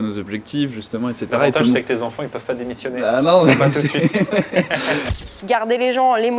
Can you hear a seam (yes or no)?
yes